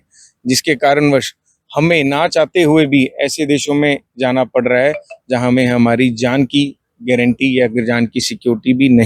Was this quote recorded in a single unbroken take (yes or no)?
yes